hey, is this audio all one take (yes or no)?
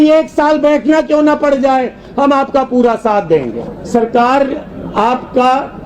no